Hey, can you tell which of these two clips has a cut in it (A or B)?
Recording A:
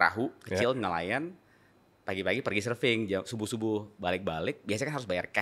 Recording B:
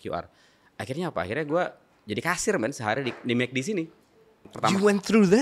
B